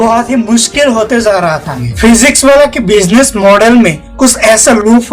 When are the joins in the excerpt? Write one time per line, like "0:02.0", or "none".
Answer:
0:01.8